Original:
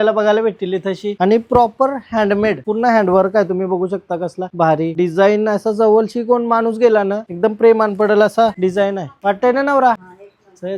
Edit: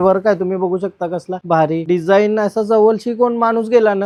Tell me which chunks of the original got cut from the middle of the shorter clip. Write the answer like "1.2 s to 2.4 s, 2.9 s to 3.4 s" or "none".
none